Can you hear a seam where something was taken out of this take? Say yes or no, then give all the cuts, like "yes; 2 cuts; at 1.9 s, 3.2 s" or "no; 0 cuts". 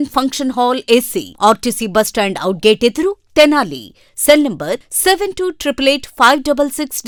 no; 0 cuts